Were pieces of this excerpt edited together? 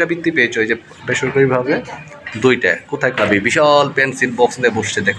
yes; 1 cut; at 3.2 s

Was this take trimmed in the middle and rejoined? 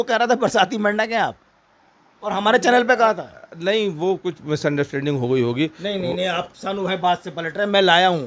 no; 0 cuts

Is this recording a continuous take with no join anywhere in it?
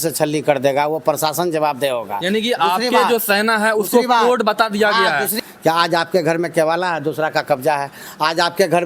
no; 1 cut; at 5.3 s

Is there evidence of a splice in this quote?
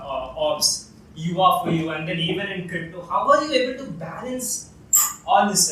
no; 0 cuts

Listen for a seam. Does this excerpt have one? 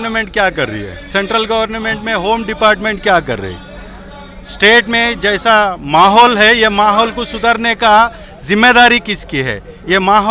no; 0 cuts

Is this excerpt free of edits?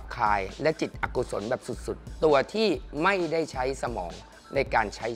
yes; 0 cuts

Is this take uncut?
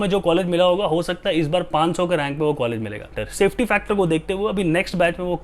no; 1 cut; at 3.2 s

